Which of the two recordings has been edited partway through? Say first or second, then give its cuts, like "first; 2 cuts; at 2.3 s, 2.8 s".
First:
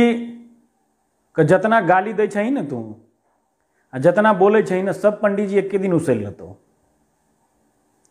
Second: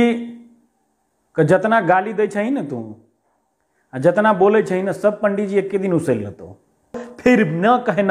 second; 1 cut; at 7.1 s